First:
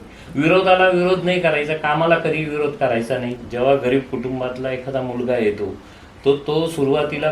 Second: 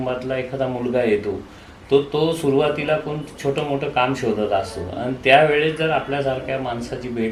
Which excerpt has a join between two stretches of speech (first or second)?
first